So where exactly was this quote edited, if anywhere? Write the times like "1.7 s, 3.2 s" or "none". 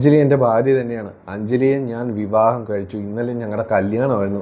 none